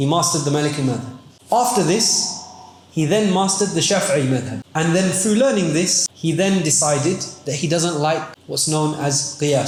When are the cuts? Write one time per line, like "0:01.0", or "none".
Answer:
none